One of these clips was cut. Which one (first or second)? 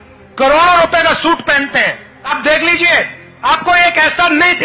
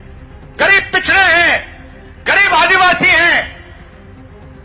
first